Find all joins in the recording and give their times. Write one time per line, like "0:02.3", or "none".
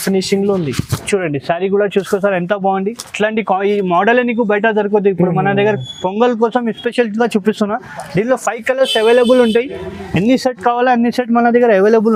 none